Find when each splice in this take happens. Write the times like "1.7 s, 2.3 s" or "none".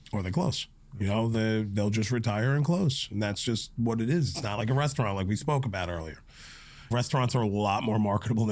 6.9 s